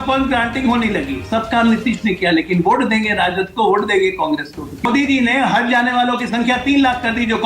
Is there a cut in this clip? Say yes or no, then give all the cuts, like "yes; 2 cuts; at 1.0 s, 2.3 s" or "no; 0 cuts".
yes; 1 cut; at 4.9 s